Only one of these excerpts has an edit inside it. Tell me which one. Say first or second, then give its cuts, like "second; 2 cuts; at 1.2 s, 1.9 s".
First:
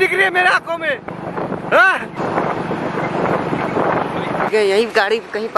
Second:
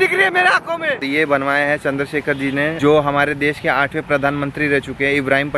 second; 2 cuts; at 1.0 s, 2.8 s